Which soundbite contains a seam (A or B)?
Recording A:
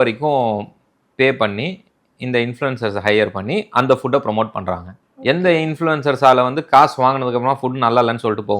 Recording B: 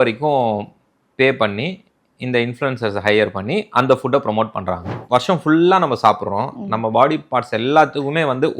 B